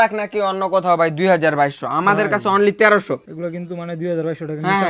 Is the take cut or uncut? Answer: uncut